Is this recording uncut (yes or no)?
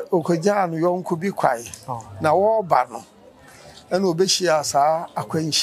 yes